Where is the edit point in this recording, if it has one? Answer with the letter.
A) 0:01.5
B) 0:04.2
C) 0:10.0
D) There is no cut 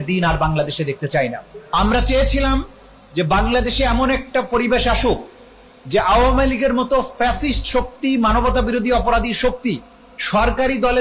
A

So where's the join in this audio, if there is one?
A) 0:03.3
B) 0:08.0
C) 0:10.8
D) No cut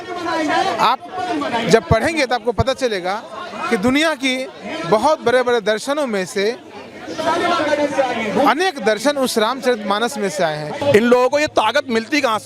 C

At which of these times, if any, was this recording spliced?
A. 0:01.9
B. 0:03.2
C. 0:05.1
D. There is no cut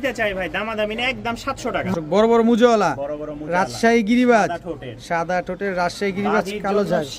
A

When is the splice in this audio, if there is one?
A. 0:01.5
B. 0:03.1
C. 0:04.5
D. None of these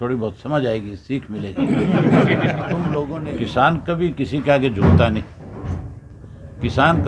B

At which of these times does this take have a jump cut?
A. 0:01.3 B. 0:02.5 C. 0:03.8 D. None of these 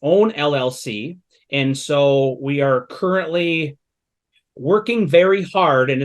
D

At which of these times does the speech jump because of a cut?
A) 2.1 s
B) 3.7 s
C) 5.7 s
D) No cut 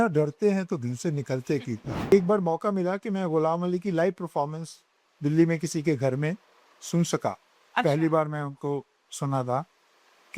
A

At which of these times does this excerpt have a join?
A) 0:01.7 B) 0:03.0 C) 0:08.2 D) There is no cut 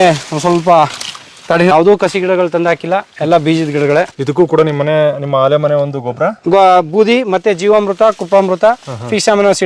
A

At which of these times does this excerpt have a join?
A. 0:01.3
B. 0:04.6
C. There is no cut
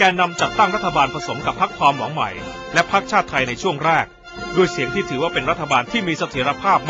C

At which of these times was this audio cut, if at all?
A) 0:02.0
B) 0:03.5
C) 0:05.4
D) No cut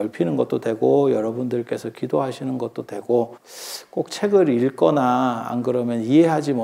B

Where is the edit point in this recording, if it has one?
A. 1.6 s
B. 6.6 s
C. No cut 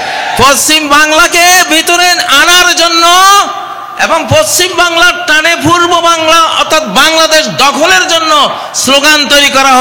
C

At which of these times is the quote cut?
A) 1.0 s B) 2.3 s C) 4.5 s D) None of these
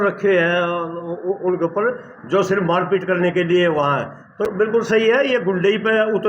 C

